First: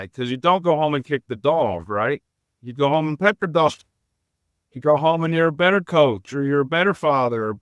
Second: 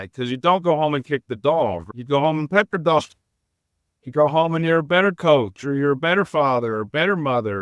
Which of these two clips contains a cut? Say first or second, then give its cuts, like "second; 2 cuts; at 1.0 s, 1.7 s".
second; 1 cut; at 1.8 s